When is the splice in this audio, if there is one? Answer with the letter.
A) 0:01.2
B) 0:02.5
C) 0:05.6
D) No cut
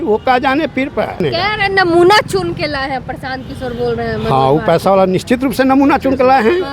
A